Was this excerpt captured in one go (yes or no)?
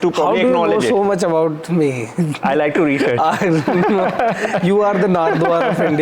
yes